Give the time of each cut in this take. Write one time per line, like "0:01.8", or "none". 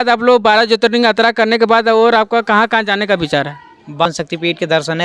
0:04.1